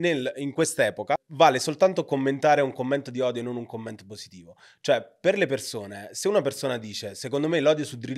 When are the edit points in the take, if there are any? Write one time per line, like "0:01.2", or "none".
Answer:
0:01.3